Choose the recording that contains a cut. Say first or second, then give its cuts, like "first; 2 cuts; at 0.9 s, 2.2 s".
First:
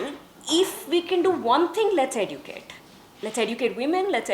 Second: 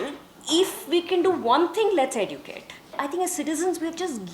second; 1 cut; at 2.9 s